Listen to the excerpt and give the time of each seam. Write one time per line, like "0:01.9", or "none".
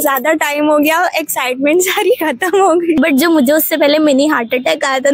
0:03.0